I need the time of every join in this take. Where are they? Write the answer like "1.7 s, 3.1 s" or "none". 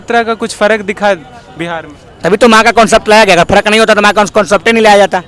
none